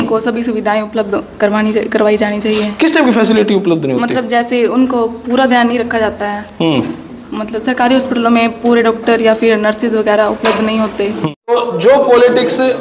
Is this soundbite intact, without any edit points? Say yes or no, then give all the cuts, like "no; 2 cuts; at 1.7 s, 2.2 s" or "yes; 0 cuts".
no; 1 cut; at 11.2 s